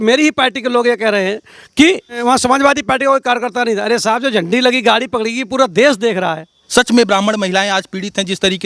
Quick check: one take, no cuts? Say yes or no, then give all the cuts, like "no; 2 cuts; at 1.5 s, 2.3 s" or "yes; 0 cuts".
no; 2 cuts; at 2.2 s, 6.6 s